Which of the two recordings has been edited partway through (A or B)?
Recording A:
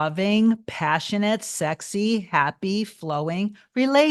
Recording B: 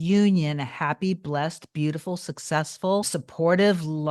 B